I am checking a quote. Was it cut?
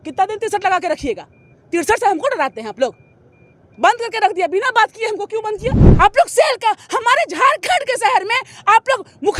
yes; 1 cut; at 5.8 s

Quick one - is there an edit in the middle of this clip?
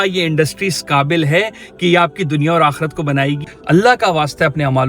yes; 1 cut; at 3.5 s

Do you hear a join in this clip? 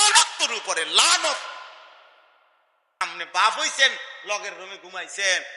yes; 1 cut; at 3.0 s

